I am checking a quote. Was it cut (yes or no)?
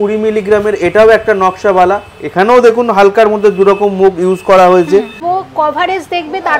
yes